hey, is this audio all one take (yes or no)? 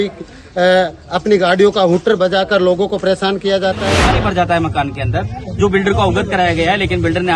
no